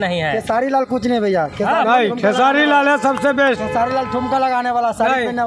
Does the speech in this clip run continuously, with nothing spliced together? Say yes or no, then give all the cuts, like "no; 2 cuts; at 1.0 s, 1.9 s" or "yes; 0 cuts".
yes; 0 cuts